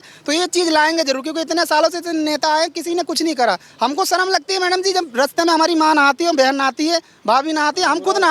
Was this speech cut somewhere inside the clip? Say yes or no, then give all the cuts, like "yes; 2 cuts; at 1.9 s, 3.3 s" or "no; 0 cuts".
no; 0 cuts